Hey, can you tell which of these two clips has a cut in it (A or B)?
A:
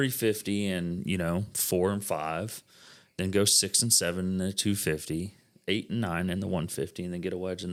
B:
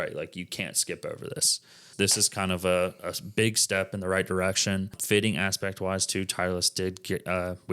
B